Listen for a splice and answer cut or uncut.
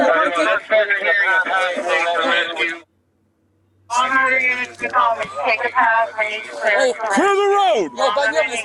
uncut